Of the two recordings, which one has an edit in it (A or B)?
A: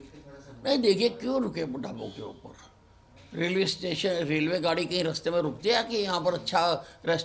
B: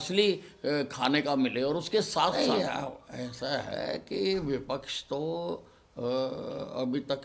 B